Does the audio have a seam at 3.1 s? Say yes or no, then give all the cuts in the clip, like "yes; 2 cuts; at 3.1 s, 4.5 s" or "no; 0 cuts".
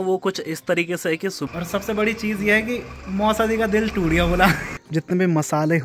no; 2 cuts; at 1.4 s, 4.7 s